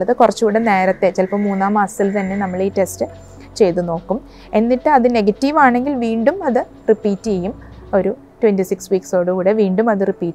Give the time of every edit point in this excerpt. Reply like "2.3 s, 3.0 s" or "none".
none